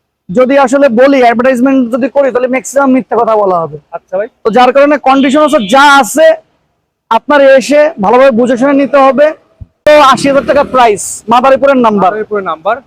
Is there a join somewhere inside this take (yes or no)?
yes